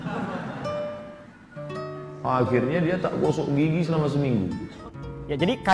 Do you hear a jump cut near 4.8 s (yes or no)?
yes